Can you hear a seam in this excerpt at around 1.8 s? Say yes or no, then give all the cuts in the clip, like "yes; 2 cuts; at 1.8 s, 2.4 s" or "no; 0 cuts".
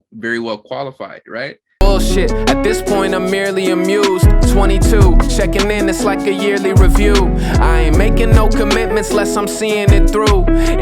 yes; 1 cut; at 1.8 s